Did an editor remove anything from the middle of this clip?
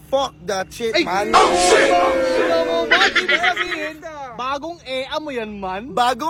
no; 0 cuts

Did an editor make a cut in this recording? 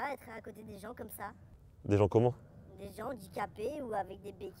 no; 0 cuts

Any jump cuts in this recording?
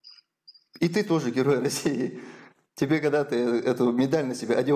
no; 0 cuts

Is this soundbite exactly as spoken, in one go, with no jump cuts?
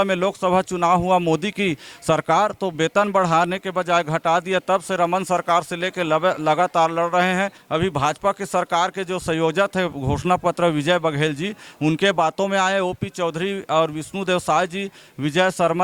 no; 1 cut; at 7.6 s

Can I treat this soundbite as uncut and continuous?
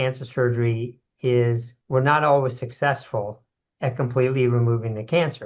no; 1 cut; at 1.7 s

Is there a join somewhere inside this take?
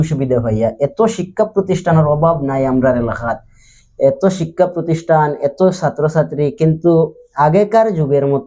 no; 0 cuts

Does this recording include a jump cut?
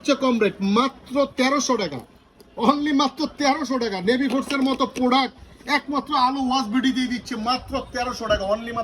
no; 0 cuts

